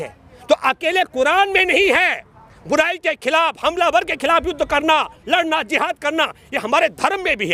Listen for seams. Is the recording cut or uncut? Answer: uncut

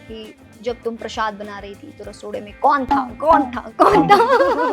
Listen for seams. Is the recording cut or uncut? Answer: uncut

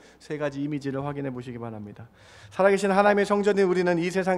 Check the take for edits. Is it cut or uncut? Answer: uncut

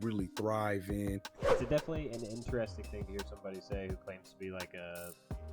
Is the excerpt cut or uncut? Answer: cut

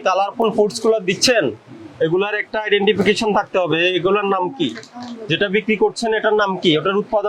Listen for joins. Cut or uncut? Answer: uncut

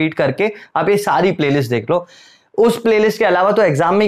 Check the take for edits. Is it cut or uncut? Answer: uncut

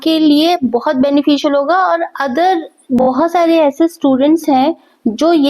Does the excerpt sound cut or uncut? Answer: cut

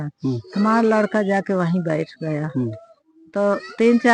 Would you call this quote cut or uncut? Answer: uncut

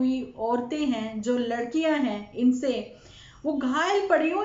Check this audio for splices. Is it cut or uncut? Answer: uncut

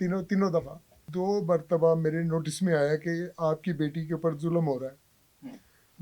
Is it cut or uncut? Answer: cut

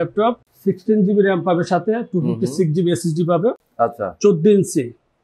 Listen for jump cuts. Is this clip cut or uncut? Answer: uncut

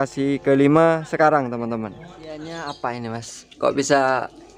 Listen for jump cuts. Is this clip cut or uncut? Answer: cut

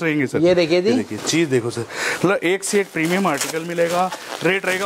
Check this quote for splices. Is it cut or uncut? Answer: uncut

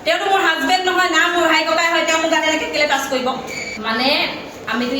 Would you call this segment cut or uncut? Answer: cut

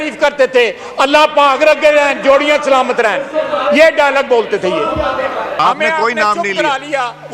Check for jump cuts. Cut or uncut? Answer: cut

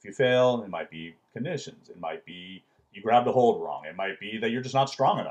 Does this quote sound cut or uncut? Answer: uncut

